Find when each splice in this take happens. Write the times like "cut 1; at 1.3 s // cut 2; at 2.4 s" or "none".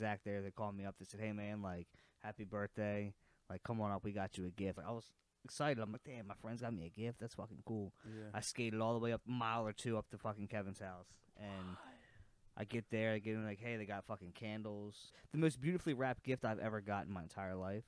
cut 1; at 4.8 s // cut 2; at 9.2 s // cut 3; at 15.2 s

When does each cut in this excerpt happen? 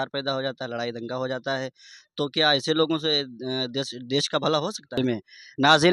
cut 1; at 4.8 s

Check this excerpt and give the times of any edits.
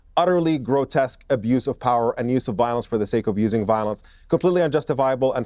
none

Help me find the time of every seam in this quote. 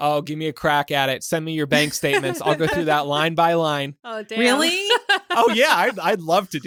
none

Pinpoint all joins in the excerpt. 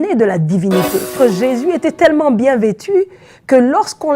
cut 1; at 1.1 s

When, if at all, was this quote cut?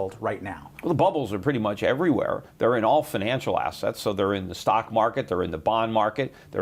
cut 1; at 4.5 s

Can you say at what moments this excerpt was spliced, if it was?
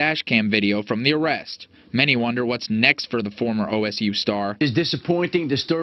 none

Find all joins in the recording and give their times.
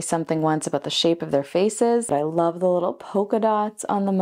cut 1; at 2.1 s

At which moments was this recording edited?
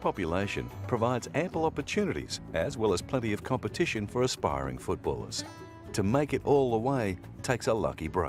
none

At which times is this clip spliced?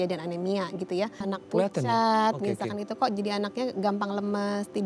cut 1; at 1.2 s

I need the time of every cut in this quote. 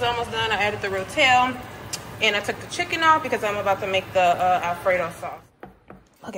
cut 1; at 5.2 s

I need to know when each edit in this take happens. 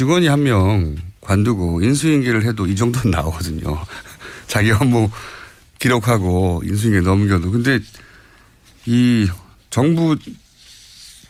none

